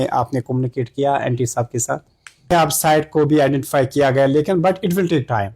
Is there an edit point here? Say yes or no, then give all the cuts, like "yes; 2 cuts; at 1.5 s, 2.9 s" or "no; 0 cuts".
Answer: yes; 1 cut; at 2.5 s